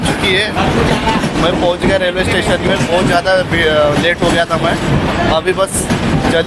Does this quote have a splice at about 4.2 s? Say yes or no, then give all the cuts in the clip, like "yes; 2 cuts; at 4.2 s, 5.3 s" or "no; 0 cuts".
no; 0 cuts